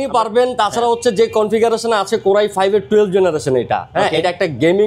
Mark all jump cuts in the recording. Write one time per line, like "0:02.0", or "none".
none

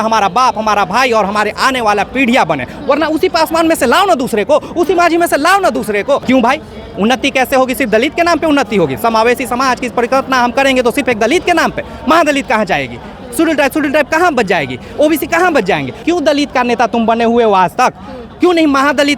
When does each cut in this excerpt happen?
0:06.2
0:16.0

